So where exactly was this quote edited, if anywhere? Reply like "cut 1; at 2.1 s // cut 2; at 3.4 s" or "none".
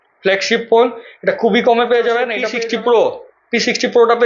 cut 1; at 2.4 s